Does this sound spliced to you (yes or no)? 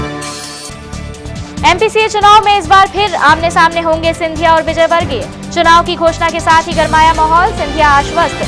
yes